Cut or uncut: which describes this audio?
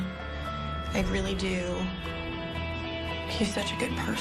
uncut